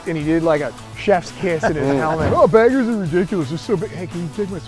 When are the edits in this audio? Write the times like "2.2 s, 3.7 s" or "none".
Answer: 2.3 s